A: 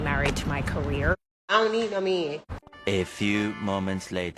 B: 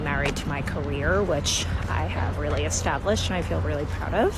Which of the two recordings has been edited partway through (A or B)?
A